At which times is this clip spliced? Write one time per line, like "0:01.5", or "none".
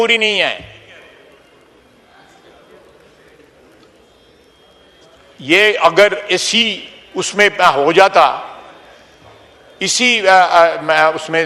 none